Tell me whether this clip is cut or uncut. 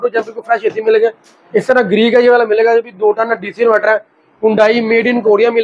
uncut